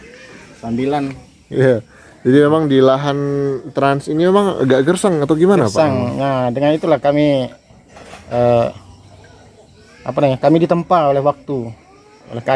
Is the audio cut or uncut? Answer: uncut